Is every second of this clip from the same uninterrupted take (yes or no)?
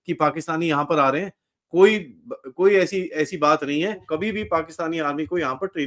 no